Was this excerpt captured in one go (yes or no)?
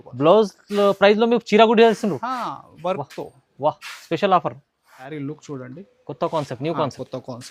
no